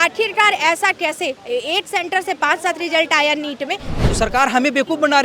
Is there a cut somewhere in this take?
yes; 1 cut; at 3.9 s

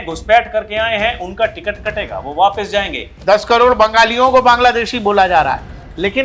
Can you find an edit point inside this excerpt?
yes; 1 cut; at 3.1 s

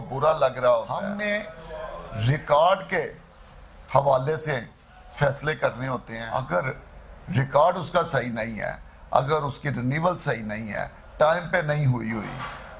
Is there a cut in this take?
yes; 2 cuts; at 1.1 s, 6.1 s

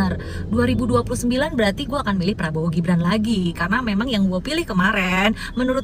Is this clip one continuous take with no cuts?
yes; 0 cuts

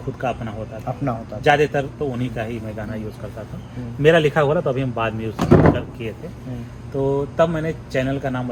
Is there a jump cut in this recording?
no; 0 cuts

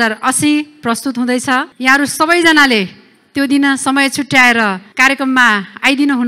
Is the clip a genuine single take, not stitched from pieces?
no; 2 cuts; at 1.7 s, 4.9 s

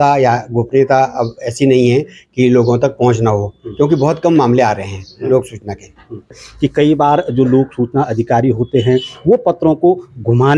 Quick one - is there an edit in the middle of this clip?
yes; 1 cut; at 6.4 s

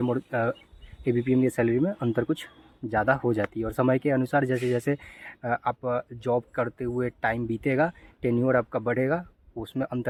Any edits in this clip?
no; 0 cuts

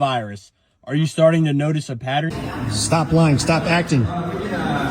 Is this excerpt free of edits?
no; 1 cut; at 2.3 s

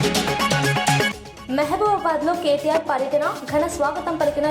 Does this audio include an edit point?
yes; 1 cut; at 1.1 s

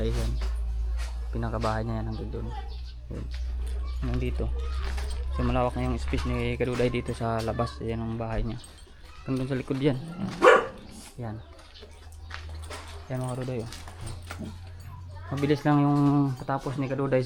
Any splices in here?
no; 0 cuts

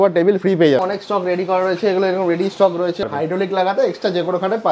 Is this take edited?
yes; 2 cuts; at 0.8 s, 3.0 s

